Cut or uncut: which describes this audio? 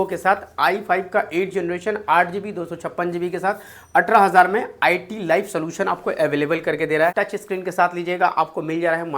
cut